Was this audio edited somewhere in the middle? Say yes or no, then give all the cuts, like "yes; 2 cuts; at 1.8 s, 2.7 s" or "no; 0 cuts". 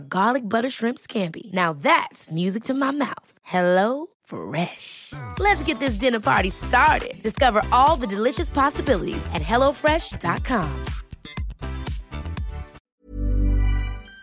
yes; 1 cut; at 12.8 s